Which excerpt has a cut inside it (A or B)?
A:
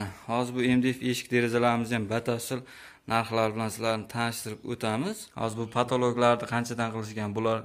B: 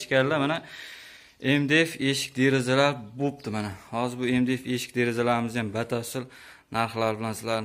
A